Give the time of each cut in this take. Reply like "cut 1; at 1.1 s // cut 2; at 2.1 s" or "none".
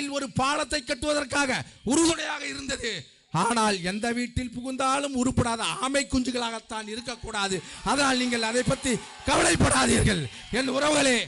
none